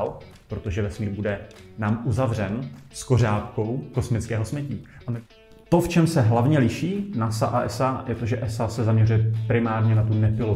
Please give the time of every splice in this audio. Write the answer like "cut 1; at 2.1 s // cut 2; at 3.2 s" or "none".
cut 1; at 5.1 s